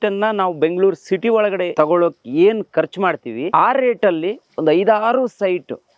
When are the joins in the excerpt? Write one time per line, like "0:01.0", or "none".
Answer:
0:01.7
0:03.4